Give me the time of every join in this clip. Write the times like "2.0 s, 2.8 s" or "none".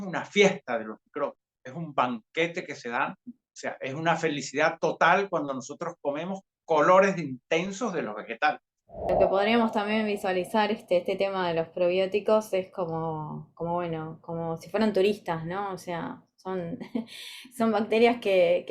9.1 s

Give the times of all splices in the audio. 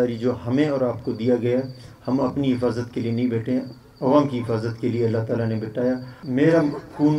6.1 s

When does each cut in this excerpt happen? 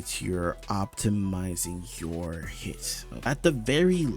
3.3 s

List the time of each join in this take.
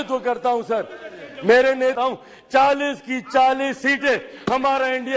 1.9 s

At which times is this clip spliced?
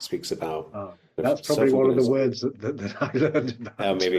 1.2 s, 2.6 s

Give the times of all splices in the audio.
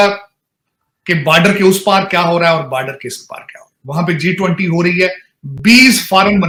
none

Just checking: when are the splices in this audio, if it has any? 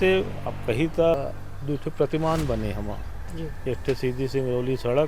1.2 s

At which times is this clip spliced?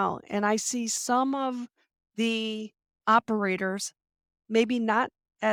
none

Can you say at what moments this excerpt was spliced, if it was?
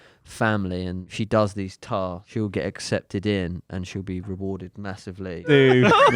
1.1 s, 2.2 s, 5.5 s

